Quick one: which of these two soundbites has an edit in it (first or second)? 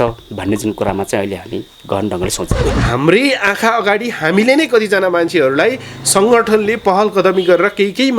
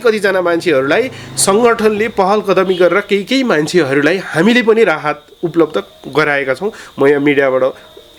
first